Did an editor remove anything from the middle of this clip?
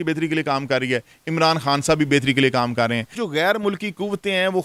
yes; 1 cut; at 3.2 s

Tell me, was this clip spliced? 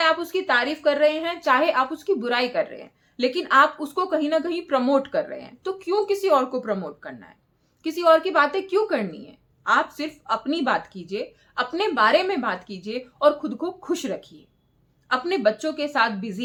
no; 0 cuts

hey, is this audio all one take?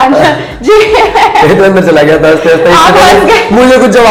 yes; 0 cuts

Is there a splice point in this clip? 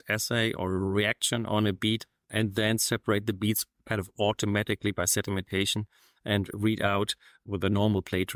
no; 0 cuts

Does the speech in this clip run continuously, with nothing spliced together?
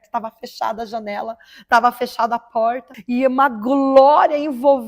no; 1 cut; at 2.9 s

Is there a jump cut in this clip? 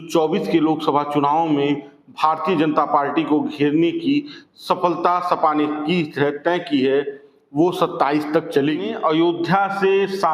yes; 1 cut; at 8.9 s

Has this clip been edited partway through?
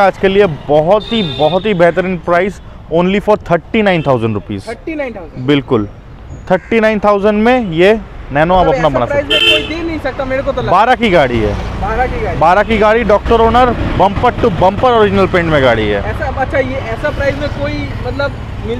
no; 0 cuts

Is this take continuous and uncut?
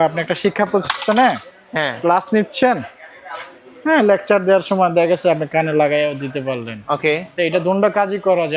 yes; 0 cuts

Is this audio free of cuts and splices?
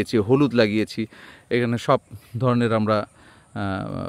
yes; 0 cuts

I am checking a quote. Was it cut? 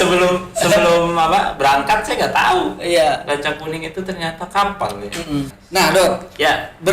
yes; 1 cut; at 5.6 s

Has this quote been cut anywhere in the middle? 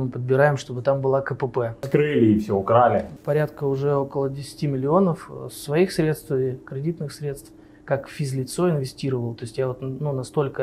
yes; 2 cuts; at 1.9 s, 3.2 s

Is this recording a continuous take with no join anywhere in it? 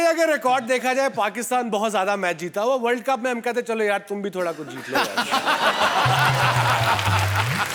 yes; 0 cuts

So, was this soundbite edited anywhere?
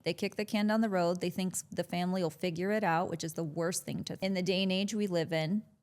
yes; 1 cut; at 4.2 s

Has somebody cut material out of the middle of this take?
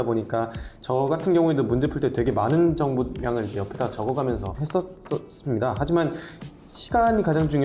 yes; 1 cut; at 4.6 s

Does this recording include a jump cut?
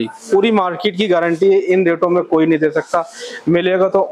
no; 0 cuts

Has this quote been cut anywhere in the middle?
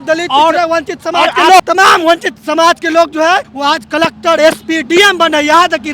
no; 0 cuts

